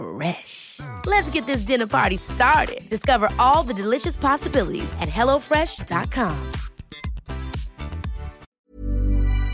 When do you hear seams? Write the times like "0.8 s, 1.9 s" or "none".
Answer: 8.5 s